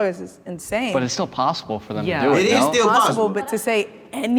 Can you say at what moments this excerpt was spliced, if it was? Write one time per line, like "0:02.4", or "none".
none